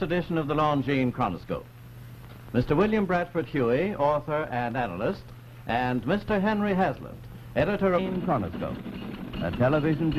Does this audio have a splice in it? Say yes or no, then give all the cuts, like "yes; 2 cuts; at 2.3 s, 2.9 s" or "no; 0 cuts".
no; 0 cuts